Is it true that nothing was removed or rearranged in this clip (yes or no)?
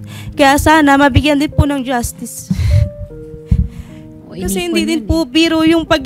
yes